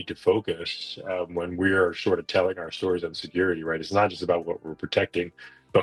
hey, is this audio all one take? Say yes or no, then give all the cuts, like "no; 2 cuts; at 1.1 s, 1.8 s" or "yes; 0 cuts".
yes; 0 cuts